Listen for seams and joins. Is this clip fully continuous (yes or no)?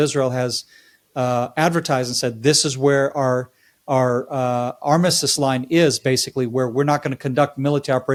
yes